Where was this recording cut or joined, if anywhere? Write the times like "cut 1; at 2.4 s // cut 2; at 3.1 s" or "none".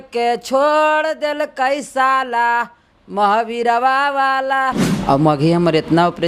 cut 1; at 4.9 s

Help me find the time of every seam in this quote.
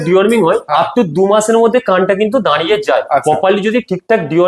none

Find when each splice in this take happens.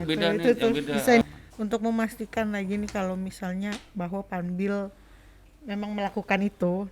cut 1; at 1.2 s

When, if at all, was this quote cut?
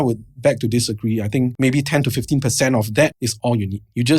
cut 1; at 1.5 s // cut 2; at 3.3 s

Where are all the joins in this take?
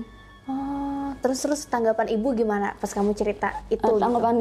cut 1; at 1.0 s

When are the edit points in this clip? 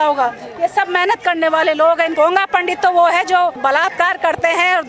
cut 1; at 2.1 s // cut 2; at 3.6 s

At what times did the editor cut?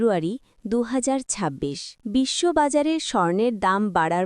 cut 1; at 1.9 s

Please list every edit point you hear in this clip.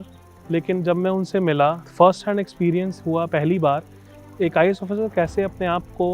cut 1; at 1.8 s // cut 2; at 4.2 s

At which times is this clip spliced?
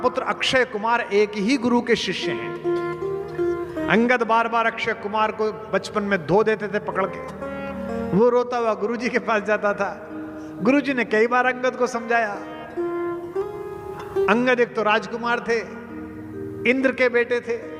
none

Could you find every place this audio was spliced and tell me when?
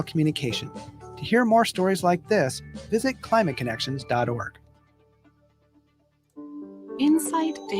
cut 1; at 6.4 s

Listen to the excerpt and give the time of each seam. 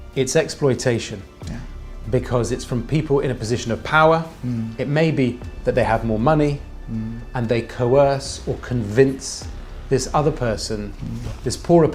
none

